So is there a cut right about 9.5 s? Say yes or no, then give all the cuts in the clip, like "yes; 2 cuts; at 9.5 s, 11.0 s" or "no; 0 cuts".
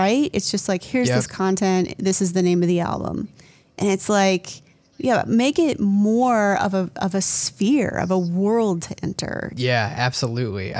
yes; 1 cut; at 9.5 s